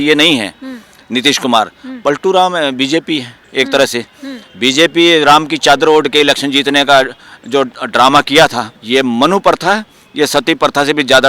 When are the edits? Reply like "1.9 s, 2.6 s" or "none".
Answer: 8.7 s